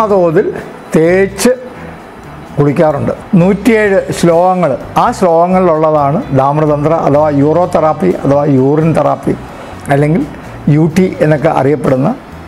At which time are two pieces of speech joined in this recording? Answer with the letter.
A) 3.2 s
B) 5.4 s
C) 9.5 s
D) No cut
A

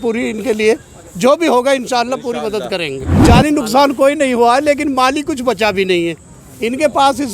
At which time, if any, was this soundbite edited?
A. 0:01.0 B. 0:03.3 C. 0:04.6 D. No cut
B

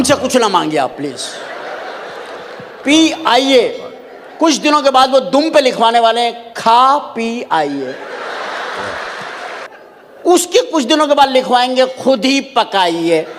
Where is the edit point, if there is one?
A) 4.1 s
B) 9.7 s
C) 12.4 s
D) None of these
B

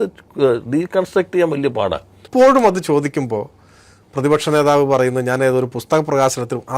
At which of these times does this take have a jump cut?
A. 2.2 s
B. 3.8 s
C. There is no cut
A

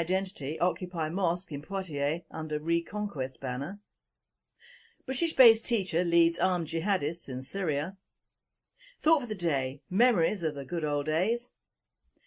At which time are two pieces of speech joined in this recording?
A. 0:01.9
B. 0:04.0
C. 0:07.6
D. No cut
D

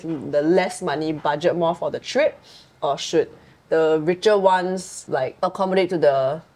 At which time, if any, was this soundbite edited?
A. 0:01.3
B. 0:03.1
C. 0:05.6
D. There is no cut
D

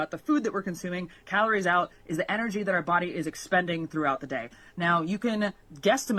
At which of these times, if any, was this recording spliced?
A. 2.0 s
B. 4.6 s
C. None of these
C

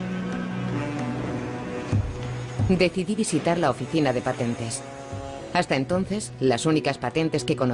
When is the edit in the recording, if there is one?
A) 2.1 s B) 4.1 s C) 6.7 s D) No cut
B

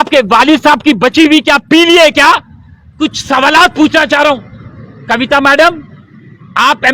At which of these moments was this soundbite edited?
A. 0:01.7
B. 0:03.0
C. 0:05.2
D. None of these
B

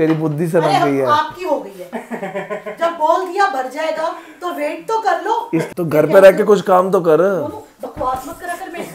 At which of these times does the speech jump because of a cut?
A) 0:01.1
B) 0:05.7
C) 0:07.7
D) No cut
B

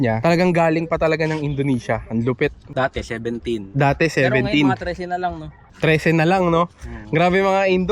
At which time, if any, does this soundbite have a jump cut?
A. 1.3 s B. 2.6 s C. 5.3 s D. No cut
B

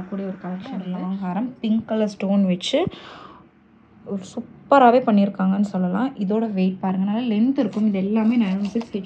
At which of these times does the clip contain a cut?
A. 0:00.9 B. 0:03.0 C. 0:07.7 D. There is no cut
A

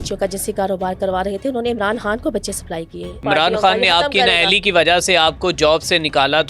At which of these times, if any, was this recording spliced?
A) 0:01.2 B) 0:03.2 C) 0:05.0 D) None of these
B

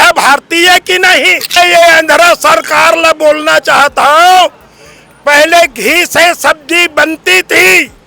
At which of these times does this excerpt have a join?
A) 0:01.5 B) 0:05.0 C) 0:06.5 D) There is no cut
A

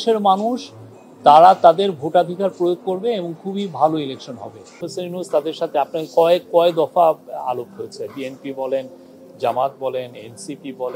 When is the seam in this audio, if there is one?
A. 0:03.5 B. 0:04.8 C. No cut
B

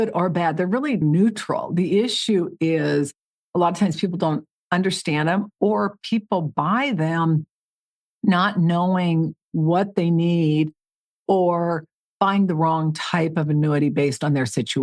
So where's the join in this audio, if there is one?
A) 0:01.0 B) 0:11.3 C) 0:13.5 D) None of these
A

